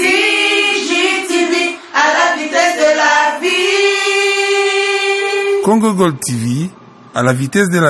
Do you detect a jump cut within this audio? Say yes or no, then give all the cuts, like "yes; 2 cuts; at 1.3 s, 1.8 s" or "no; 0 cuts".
no; 0 cuts